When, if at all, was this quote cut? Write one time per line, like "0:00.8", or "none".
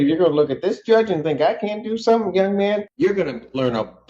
0:02.9